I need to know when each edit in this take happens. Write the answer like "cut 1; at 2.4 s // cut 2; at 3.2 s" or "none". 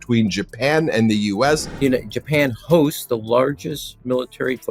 cut 1; at 1.7 s